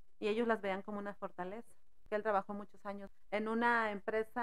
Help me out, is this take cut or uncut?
cut